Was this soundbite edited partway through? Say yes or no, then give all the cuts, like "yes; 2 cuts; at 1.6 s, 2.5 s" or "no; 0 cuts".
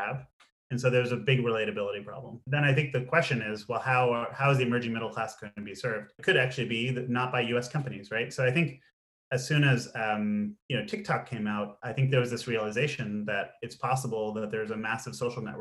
no; 0 cuts